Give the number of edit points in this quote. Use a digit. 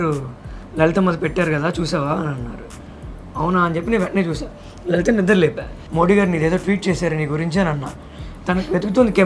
2